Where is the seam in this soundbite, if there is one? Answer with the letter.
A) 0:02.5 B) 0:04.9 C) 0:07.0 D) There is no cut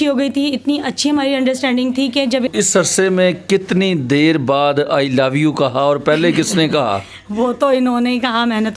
A